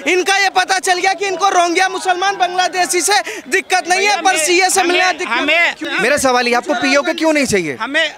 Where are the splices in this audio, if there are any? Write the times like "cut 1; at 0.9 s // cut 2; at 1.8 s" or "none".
cut 1; at 5.8 s